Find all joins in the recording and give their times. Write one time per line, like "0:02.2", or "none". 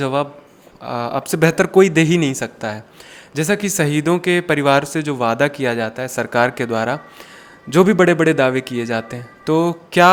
none